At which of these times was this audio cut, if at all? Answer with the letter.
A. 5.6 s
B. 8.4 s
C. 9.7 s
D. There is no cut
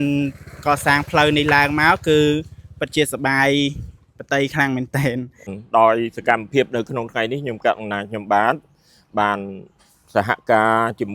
A